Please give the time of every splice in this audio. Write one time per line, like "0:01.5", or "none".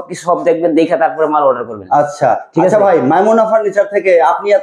none